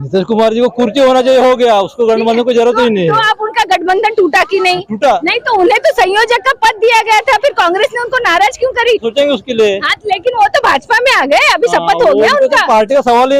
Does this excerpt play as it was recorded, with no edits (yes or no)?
no